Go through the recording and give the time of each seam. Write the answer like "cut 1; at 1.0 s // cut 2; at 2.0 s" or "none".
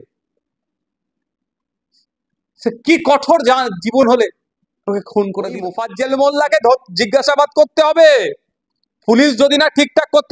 cut 1; at 5.8 s